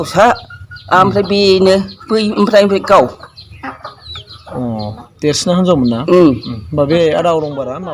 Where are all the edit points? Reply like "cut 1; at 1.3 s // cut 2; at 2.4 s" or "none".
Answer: none